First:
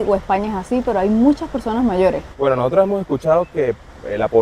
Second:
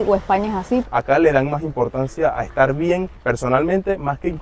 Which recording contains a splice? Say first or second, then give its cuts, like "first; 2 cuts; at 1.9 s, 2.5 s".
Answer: second; 2 cuts; at 0.8 s, 3.2 s